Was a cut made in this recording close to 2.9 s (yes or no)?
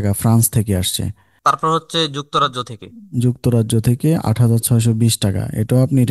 no